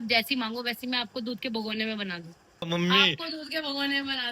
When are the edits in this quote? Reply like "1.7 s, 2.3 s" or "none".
2.7 s